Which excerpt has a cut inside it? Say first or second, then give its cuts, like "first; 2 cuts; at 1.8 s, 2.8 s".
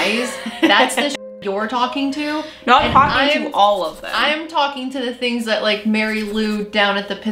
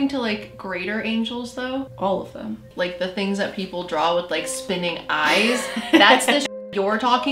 second; 2 cuts; at 1.9 s, 2.7 s